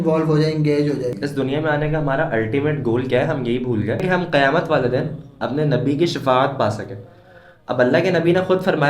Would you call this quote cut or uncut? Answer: cut